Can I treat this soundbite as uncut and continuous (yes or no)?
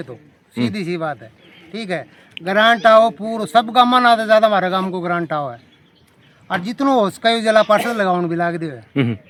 yes